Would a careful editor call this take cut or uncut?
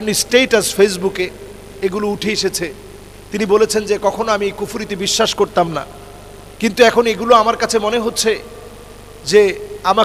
uncut